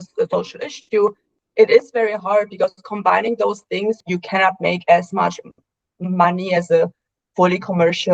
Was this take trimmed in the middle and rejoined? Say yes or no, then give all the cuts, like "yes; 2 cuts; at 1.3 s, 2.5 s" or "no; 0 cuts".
yes; 1 cut; at 4.0 s